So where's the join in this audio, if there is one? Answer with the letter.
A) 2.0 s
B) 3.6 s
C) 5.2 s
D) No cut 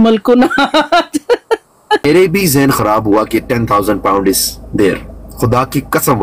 A